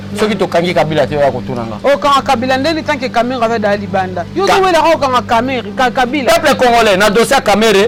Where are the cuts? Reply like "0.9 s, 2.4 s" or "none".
none